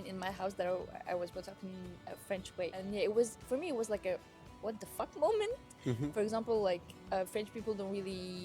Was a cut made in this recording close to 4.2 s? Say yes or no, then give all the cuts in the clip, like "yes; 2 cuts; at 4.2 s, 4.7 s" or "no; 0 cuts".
no; 2 cuts; at 2.8 s, 6.1 s